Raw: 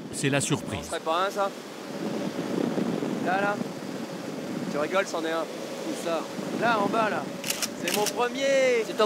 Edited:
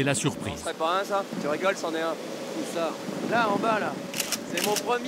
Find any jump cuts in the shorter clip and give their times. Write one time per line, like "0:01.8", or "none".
0:01.3

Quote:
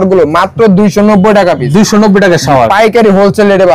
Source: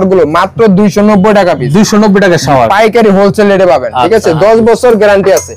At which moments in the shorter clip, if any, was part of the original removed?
none

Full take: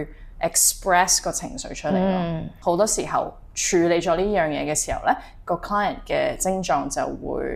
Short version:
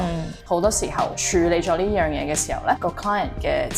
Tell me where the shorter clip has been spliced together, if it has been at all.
0:01.2
0:02.8

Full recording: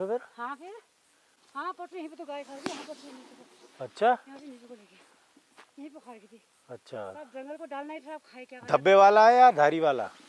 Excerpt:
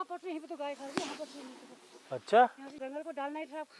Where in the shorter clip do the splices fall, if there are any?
0:02.7

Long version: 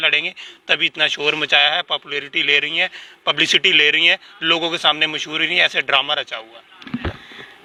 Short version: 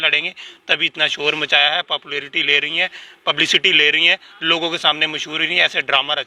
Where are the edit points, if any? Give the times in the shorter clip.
none

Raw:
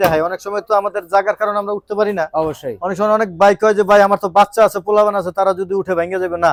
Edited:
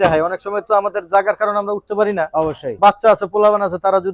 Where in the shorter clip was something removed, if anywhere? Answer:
0:02.7

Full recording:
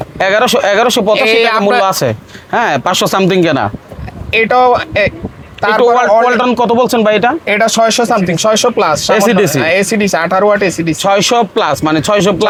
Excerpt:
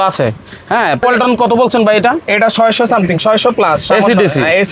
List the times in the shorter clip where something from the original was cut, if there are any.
0:01.0

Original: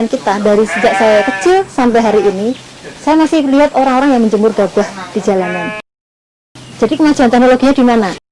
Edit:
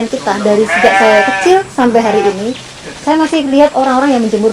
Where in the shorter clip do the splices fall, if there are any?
none

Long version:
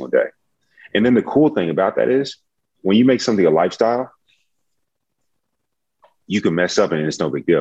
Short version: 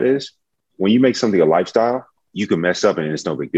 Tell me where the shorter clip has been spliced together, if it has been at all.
0:02.2

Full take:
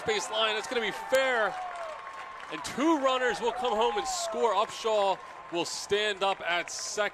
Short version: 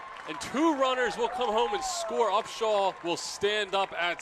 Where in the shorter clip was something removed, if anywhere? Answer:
0:03.0

